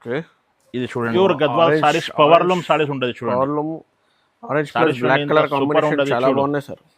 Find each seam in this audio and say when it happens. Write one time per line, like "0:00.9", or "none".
0:01.1